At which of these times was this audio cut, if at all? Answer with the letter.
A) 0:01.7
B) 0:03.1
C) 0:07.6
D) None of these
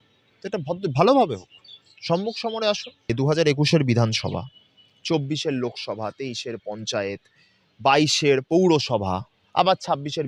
B